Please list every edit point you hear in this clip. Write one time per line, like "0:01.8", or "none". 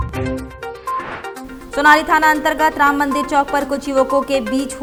none